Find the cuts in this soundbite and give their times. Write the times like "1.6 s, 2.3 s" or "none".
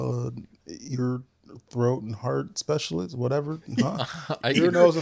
none